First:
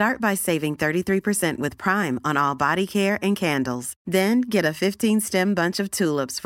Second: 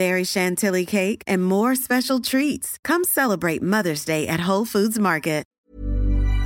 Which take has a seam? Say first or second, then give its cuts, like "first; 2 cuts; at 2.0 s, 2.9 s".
second; 1 cut; at 5.5 s